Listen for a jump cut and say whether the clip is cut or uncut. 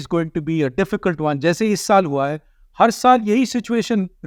uncut